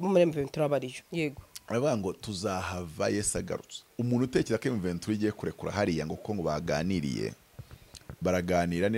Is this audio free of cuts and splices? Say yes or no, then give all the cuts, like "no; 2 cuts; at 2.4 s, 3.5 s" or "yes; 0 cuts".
no; 2 cuts; at 1.0 s, 3.8 s